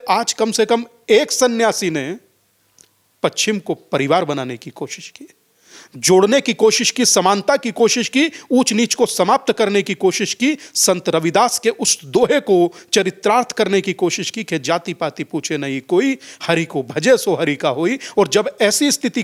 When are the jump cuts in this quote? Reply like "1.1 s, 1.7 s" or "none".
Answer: none